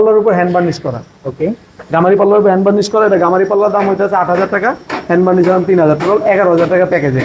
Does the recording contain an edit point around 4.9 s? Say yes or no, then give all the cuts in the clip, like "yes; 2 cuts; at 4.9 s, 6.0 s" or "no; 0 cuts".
no; 0 cuts